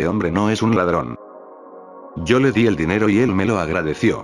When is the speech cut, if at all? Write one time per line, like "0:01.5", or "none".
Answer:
0:03.3